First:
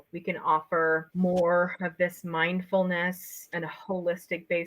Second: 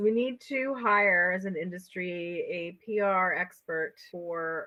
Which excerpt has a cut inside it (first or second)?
first